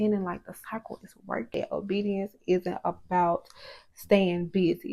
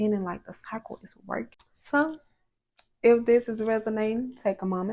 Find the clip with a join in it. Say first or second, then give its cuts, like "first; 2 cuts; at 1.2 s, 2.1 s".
first; 1 cut; at 1.6 s